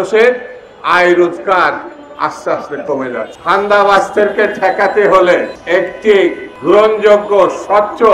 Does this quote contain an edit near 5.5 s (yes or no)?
yes